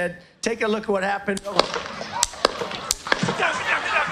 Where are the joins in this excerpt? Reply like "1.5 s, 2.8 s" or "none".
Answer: none